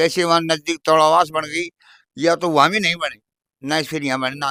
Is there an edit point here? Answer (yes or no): no